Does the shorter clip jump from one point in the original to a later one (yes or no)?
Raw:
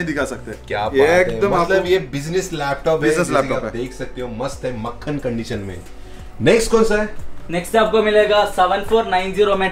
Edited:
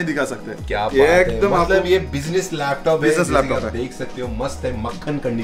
no